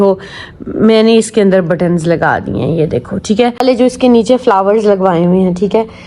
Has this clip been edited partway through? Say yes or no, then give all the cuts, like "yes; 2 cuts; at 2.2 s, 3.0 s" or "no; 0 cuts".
yes; 1 cut; at 3.6 s